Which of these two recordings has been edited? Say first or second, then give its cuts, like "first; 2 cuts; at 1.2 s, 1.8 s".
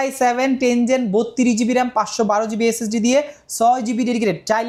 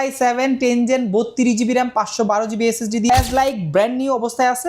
second; 1 cut; at 3.1 s